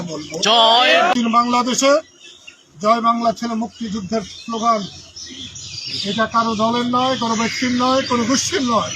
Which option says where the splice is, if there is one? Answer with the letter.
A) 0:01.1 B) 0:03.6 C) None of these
A